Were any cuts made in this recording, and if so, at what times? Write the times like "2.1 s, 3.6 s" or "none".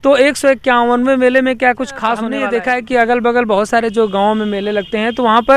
2.4 s